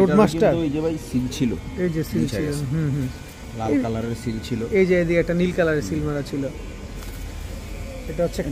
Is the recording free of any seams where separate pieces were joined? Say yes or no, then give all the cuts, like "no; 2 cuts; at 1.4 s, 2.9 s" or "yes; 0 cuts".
yes; 0 cuts